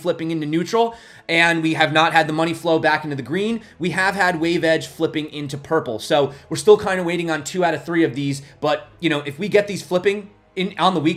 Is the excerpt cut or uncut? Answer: uncut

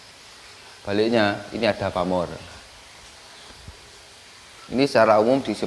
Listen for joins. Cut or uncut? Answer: uncut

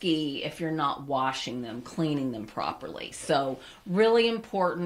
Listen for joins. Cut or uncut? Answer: uncut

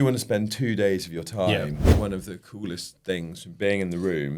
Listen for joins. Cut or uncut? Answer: cut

